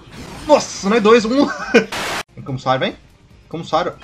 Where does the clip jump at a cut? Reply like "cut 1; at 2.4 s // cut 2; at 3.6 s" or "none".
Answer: cut 1; at 2.0 s